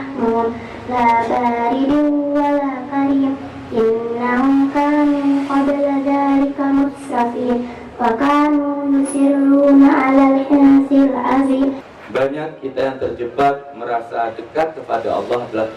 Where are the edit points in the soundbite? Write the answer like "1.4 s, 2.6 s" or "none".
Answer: 11.8 s